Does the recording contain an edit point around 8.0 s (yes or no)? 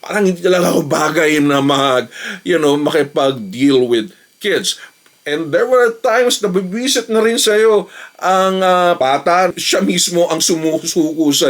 no